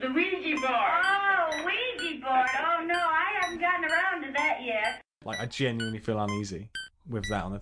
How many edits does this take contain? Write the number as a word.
one